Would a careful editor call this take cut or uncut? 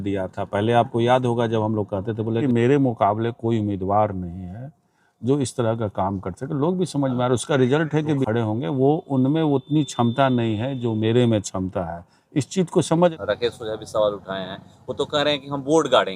cut